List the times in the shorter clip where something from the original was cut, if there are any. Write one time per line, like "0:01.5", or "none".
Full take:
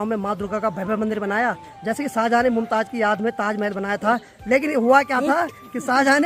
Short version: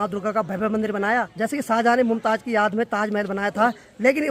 0:01.3

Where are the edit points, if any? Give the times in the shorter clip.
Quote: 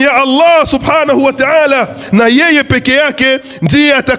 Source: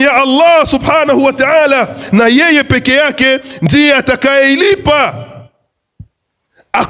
none

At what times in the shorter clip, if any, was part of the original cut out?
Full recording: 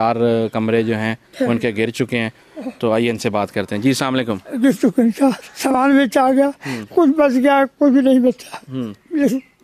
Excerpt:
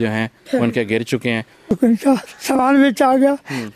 0:01.7

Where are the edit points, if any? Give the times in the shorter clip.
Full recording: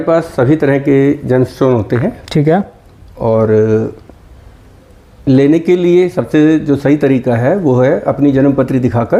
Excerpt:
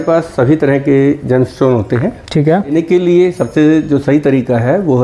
0:02.7

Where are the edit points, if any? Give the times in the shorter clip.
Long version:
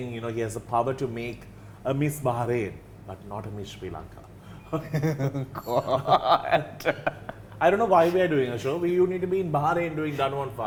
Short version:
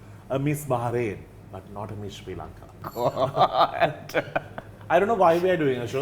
0:02.8

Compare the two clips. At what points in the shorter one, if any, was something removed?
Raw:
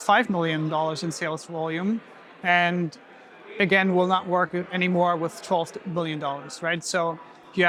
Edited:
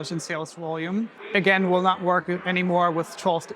0:01.2

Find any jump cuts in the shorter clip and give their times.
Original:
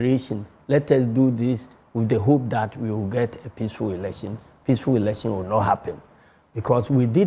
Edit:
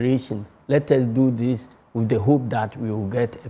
none

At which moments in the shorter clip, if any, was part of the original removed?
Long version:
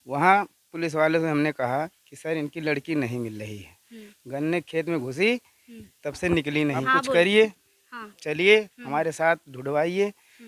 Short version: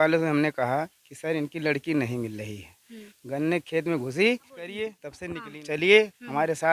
0:05.1

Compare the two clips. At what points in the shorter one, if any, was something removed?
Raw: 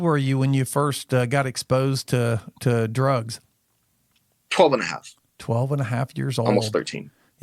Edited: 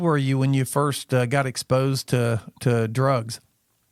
none

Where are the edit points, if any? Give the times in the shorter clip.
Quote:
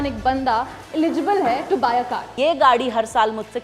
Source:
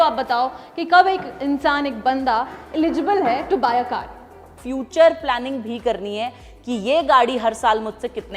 0:02.3

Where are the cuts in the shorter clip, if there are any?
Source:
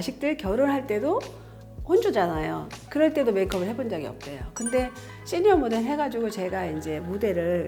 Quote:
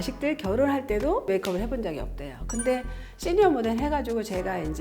0:01.3

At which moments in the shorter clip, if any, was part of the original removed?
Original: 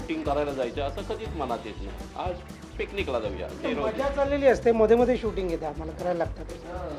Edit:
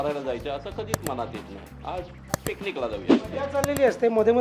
0:03.3

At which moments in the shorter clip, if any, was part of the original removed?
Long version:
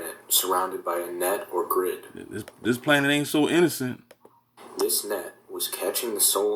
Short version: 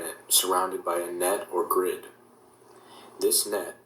0:02.5

